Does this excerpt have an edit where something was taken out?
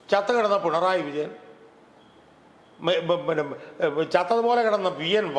no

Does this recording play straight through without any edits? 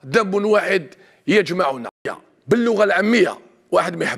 no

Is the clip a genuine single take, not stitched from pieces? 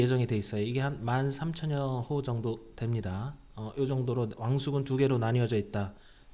yes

